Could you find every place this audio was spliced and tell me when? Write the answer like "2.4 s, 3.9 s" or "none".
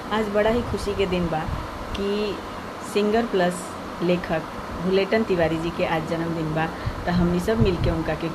none